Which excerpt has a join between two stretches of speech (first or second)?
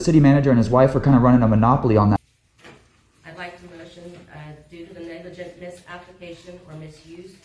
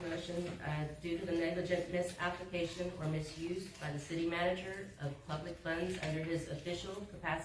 first